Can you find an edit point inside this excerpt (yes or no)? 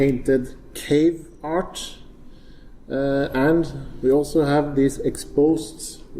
yes